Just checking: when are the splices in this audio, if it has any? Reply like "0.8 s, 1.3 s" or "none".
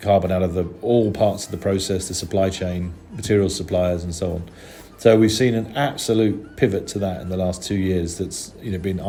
none